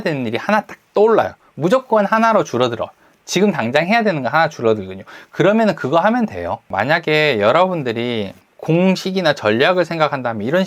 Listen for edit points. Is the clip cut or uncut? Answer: cut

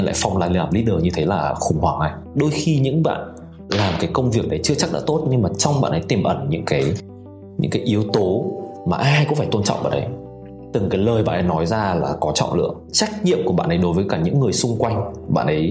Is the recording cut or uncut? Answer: cut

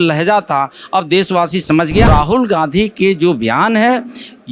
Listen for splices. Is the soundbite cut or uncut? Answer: cut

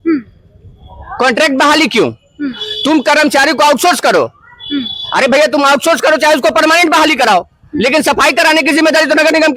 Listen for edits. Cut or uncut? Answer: uncut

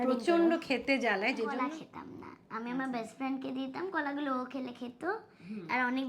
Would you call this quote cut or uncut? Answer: cut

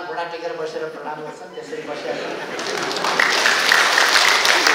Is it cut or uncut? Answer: uncut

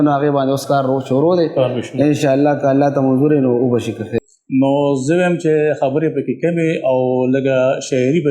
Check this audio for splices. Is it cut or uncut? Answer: cut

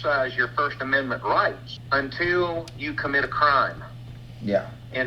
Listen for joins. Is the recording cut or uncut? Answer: cut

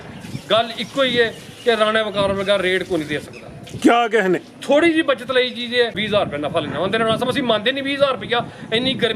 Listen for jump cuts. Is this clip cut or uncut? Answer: cut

